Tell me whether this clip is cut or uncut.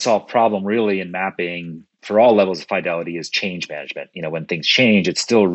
uncut